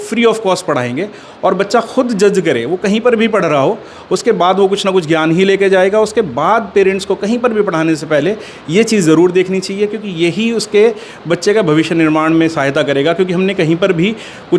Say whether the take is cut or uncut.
uncut